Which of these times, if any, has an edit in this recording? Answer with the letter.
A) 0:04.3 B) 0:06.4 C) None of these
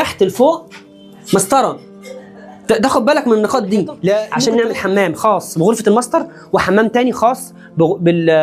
A